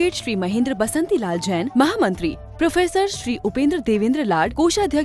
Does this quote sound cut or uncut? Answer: uncut